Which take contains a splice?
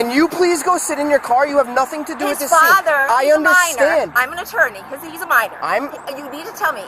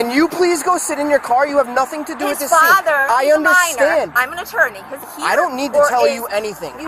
second; 1 cut; at 5.1 s

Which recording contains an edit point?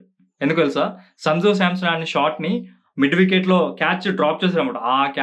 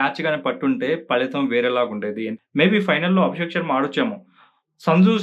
second; 1 cut; at 2.3 s

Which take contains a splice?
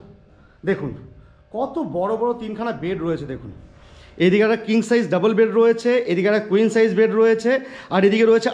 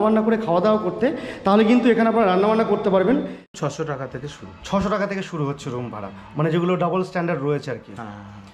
second; 1 cut; at 3.5 s

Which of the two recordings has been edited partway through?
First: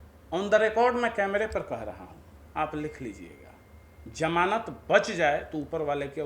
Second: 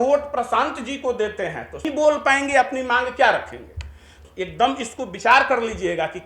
second; 2 cuts; at 1.8 s, 4.1 s

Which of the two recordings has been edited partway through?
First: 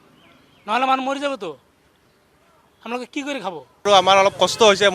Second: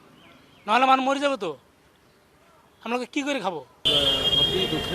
first; 1 cut; at 3.7 s

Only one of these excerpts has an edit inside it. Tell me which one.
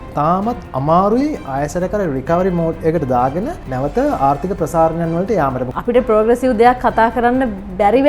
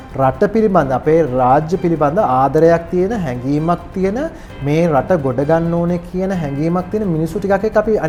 first; 2 cuts; at 3.6 s, 5.6 s

